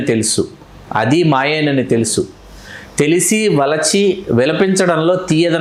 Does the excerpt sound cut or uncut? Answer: uncut